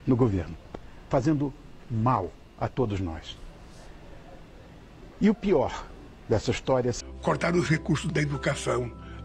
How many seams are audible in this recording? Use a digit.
1